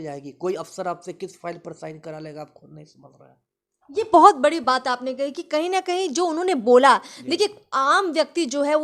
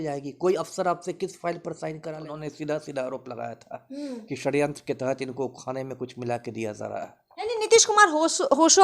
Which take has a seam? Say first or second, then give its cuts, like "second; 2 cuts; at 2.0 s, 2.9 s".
second; 1 cut; at 2.3 s